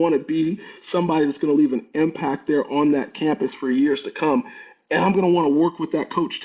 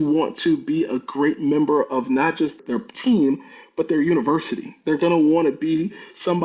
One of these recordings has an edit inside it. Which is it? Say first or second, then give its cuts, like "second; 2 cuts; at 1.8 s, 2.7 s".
second; 1 cut; at 2.6 s